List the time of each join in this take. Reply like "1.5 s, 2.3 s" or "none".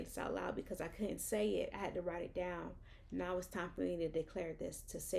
none